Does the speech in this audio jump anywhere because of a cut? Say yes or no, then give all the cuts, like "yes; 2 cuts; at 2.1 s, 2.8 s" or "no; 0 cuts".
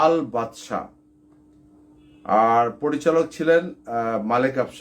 yes; 1 cut; at 1.4 s